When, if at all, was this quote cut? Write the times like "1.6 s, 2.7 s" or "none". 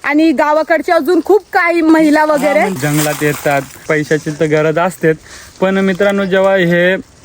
1.9 s, 2.8 s, 3.9 s